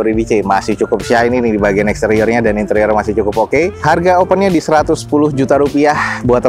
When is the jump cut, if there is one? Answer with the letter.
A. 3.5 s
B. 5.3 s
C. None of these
C